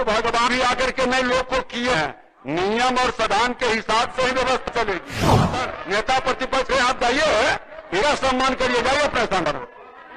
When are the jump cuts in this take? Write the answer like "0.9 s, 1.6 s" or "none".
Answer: 5.5 s